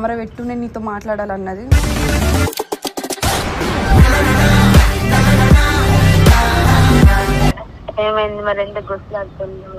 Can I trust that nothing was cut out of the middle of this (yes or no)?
no